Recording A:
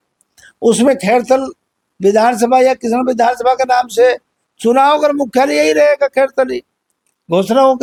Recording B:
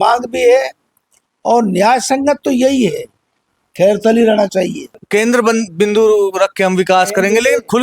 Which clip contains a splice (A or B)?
B